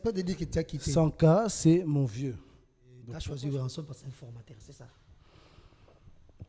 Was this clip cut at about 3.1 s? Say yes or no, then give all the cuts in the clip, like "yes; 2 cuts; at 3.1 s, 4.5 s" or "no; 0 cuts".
yes; 1 cut; at 3.1 s